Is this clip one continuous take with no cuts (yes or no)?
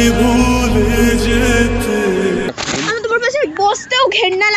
no